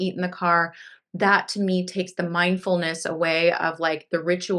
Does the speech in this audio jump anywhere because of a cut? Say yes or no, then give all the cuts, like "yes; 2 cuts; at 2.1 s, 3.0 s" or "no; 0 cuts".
no; 0 cuts